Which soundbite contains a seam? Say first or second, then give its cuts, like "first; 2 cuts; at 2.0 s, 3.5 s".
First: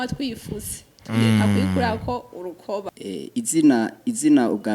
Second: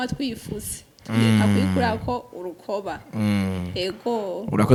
first; 1 cut; at 3.0 s